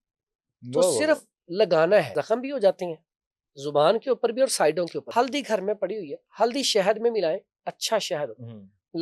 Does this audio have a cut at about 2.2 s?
yes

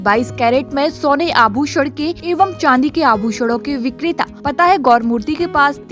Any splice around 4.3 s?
yes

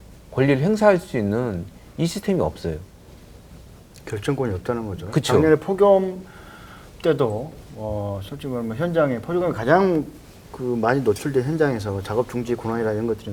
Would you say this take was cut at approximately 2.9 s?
no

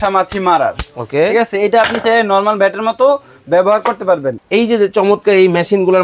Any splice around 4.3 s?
yes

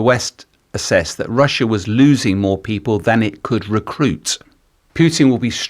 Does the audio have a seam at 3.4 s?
no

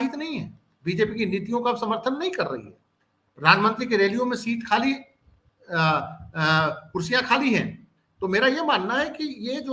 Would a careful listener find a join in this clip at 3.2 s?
no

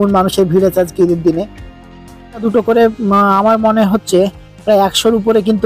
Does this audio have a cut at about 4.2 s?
no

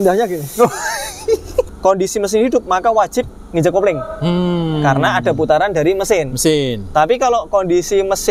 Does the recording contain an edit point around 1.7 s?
yes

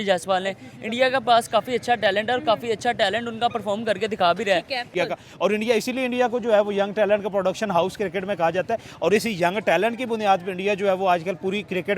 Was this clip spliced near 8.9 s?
no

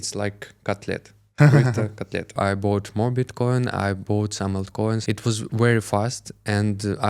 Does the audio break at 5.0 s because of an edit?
yes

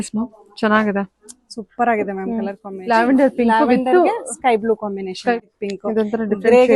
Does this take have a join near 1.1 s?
no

